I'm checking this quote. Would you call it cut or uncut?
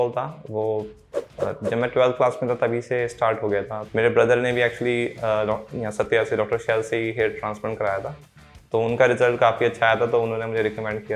cut